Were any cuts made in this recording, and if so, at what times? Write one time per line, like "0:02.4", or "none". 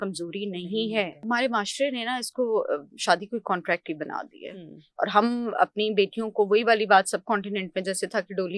0:01.2